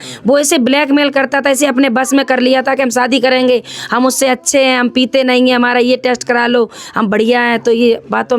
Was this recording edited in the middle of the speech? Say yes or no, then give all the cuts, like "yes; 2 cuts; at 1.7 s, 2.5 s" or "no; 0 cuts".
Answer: no; 0 cuts